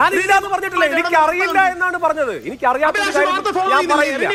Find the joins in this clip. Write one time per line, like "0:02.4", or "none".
none